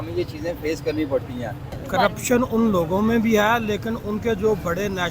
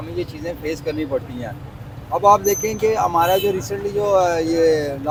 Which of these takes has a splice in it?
first; 1 cut; at 1.7 s

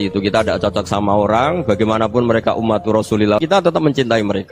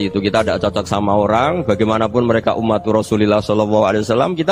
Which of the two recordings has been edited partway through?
first; 1 cut; at 3.6 s

